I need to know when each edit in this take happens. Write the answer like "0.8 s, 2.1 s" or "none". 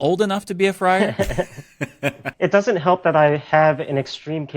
2.3 s